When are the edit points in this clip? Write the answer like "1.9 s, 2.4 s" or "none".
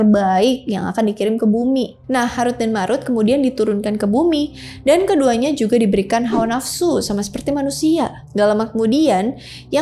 2.0 s, 8.2 s